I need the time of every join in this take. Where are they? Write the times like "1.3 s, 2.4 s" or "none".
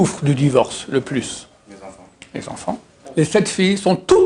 3.0 s